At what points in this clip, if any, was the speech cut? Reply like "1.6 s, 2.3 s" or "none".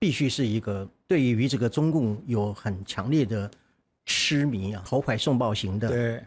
0.9 s, 4.8 s